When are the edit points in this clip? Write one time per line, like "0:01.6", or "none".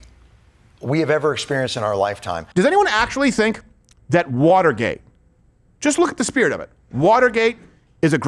0:02.4